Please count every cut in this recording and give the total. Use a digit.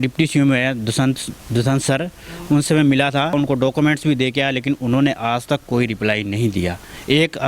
1